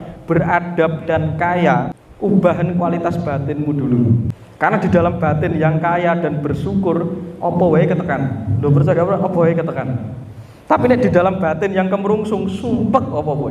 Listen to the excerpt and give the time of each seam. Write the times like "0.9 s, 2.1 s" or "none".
2.0 s, 4.4 s